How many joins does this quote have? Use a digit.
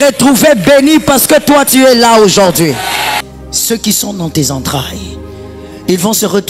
1